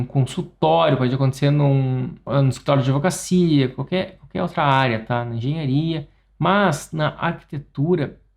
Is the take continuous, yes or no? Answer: no